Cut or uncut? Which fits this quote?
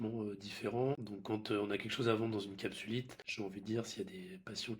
cut